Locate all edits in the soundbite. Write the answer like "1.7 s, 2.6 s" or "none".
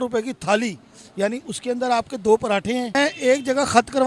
2.9 s